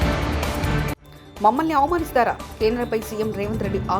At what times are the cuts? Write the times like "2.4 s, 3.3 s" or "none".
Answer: 1.1 s